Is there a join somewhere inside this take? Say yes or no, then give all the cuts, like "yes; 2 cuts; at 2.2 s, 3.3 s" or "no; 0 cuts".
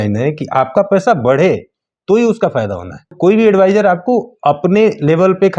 yes; 1 cut; at 3.1 s